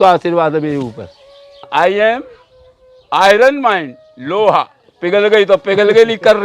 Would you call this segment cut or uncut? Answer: cut